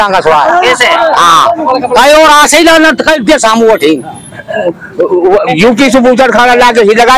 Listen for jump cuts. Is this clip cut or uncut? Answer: cut